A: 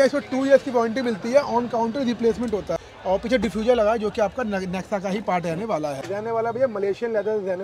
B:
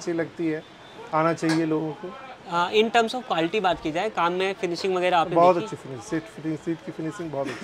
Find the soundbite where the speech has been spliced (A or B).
A